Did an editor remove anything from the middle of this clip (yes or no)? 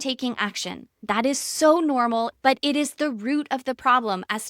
yes